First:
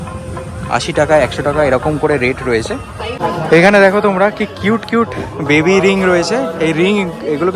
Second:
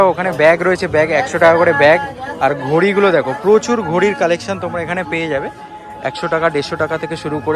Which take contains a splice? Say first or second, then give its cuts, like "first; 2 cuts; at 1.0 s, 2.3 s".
first; 1 cut; at 3.1 s